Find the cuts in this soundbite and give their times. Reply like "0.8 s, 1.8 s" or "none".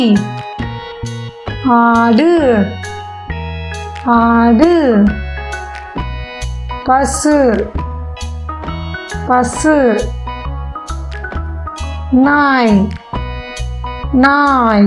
7.7 s, 9.3 s, 10.4 s, 11.8 s